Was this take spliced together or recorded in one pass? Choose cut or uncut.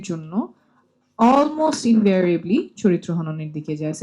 uncut